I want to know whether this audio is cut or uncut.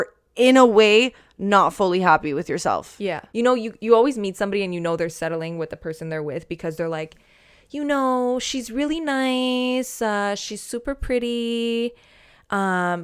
cut